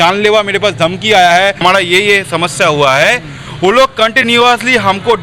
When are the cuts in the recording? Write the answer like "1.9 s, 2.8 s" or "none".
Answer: 1.6 s